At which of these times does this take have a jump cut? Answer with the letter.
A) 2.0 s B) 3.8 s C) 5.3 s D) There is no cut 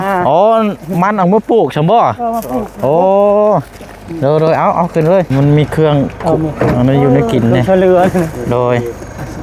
C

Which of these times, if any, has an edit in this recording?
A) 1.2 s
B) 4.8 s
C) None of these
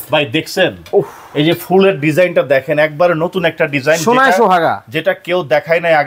C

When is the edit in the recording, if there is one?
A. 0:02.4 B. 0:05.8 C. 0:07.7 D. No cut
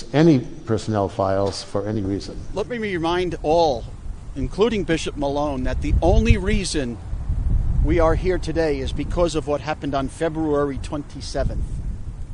A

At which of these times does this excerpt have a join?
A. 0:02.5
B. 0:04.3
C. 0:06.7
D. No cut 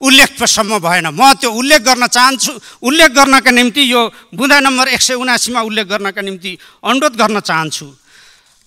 D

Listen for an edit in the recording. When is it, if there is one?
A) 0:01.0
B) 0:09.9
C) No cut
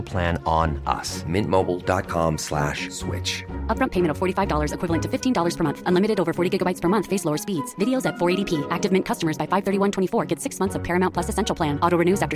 C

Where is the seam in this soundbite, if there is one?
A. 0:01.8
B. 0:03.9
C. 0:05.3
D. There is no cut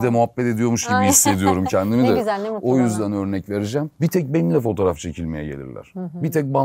D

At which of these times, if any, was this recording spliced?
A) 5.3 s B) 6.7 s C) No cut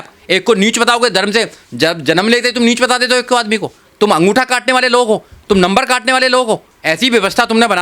B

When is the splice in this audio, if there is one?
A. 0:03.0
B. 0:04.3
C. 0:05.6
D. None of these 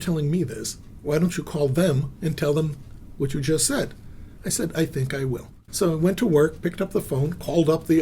C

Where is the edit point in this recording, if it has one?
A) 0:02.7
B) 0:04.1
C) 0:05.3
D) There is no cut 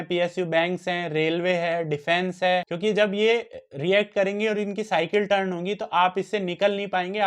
A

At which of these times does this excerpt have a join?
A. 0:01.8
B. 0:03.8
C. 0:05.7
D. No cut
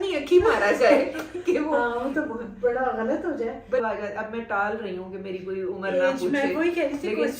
B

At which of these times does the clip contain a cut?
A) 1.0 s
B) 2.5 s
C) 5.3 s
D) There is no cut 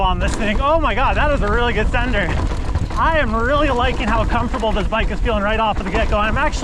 D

